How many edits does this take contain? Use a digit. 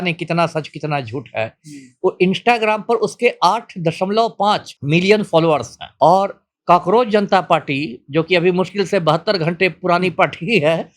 2